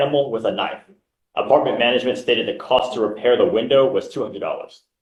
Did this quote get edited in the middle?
no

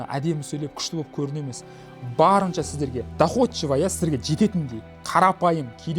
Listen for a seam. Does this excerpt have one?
yes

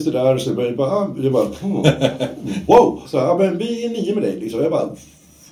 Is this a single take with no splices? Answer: no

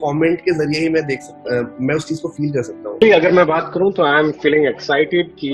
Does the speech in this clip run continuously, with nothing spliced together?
no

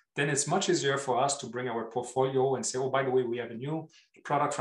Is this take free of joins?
yes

